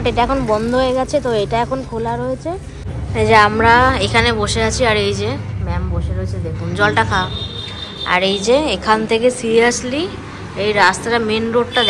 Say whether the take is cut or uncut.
cut